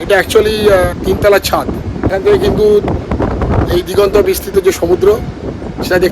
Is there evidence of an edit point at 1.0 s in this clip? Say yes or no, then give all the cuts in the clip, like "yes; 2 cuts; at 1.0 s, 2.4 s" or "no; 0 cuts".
yes; 2 cuts; at 1.0 s, 2.1 s